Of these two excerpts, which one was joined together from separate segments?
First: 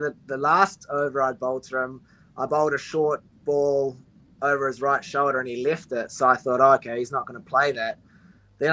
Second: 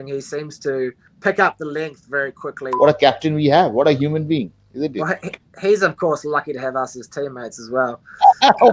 second; 2 cuts; at 1.1 s, 2.6 s

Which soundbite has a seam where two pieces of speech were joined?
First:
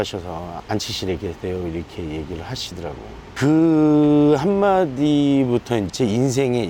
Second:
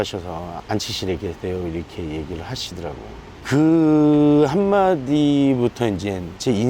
first; 2 cuts; at 3.2 s, 5.9 s

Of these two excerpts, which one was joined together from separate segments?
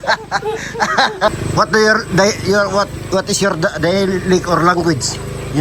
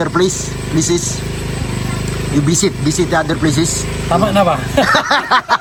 first; 1 cut; at 1.3 s

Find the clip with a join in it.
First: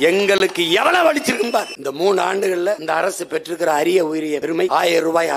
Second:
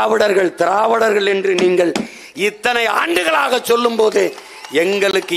first; 3 cuts; at 1.8 s, 2.8 s, 4.5 s

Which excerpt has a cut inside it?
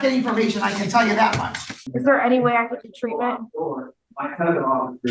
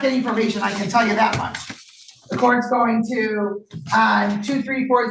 first; 1 cut; at 1.9 s

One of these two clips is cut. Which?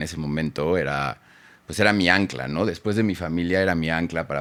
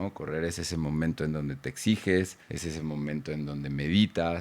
second; 1 cut; at 2.4 s

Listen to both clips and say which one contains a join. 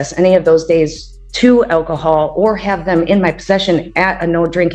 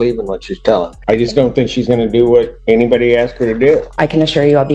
second; 3 cuts; at 0.9 s, 2.6 s, 3.9 s

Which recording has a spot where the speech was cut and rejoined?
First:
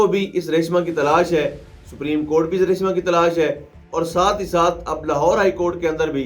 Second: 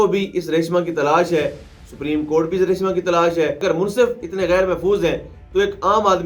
second; 1 cut; at 3.6 s

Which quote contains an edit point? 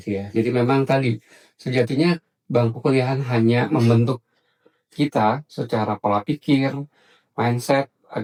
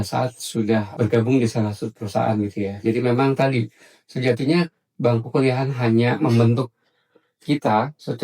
second; 1 cut; at 0.9 s

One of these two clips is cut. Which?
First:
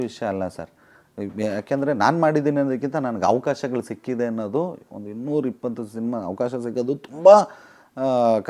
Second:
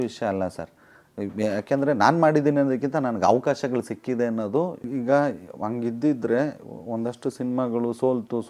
second; 1 cut; at 4.8 s

